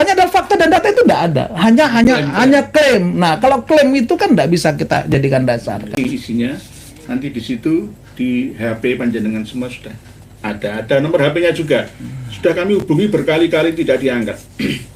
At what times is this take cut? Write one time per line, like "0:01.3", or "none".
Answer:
0:06.0

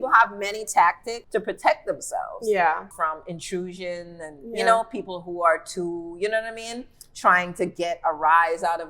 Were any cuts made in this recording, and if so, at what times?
0:01.1
0:02.9

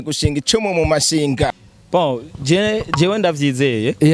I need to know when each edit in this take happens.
0:01.7

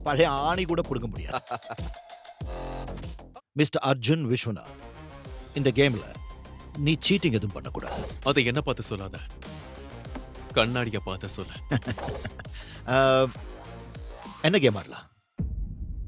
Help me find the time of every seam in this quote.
0:03.2

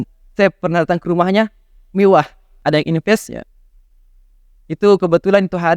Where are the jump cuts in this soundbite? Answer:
0:02.4

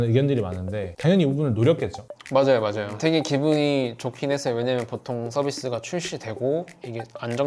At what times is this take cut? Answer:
0:00.9
0:02.9

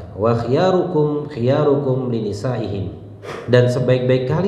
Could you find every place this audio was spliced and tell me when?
0:03.4

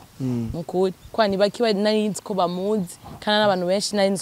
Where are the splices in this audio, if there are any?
none

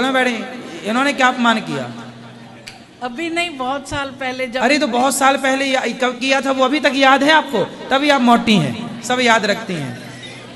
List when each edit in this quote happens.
none

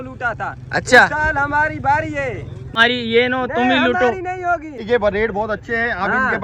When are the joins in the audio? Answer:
0:02.8
0:04.8

